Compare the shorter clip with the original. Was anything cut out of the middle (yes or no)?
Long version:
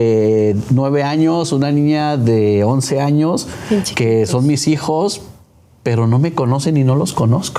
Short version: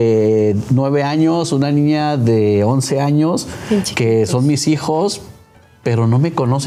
no